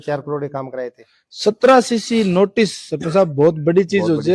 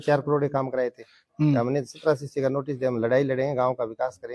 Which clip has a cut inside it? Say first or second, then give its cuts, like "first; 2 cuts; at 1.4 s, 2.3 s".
second; 1 cut; at 1.3 s